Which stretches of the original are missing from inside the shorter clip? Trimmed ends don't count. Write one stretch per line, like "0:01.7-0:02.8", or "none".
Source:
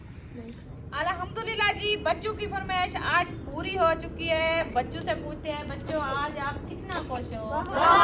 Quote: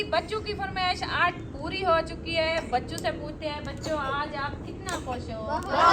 0:04.5-0:04.6